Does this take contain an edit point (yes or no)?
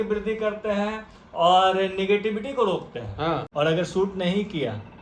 yes